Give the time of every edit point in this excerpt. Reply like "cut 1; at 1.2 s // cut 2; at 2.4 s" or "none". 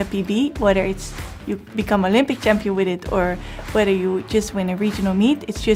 none